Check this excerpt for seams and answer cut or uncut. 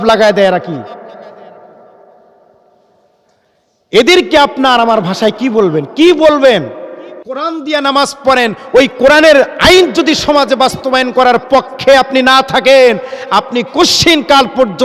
cut